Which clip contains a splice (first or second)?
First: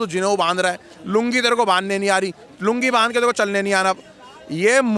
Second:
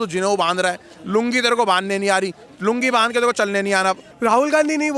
second